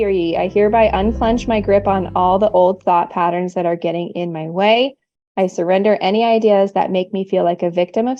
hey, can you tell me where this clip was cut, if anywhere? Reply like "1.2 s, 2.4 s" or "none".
none